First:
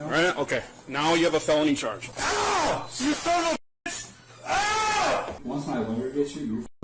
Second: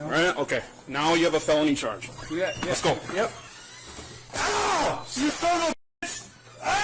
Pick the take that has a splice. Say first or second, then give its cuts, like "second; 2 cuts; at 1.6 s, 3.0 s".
first; 2 cuts; at 2.1 s, 5.4 s